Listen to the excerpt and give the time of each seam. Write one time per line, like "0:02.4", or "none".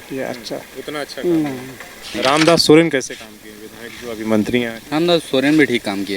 0:02.1
0:04.8